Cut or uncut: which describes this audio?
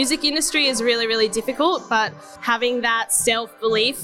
cut